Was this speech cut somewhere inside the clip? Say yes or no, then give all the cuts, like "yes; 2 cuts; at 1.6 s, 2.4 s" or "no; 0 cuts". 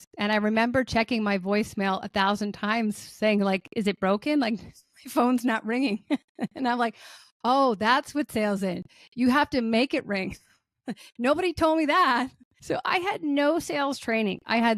yes; 1 cut; at 12.5 s